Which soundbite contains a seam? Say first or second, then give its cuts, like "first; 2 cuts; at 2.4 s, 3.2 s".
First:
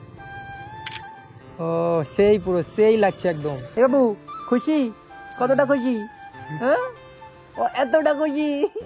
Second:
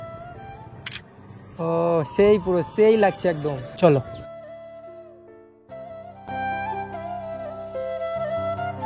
first; 1 cut; at 3.7 s